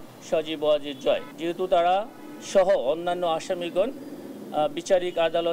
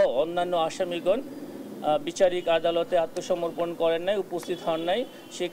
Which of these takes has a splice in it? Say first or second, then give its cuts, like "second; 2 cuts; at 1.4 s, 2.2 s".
first; 1 cut; at 1.3 s